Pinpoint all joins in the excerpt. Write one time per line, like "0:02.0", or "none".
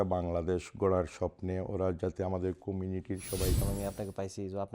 0:03.6